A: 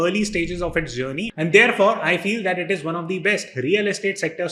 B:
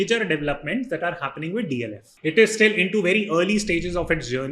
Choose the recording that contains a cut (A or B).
B